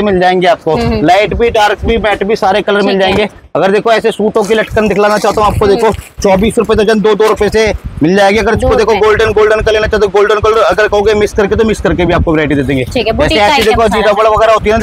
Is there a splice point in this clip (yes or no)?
no